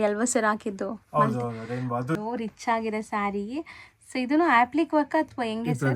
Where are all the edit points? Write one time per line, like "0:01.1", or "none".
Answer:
0:02.2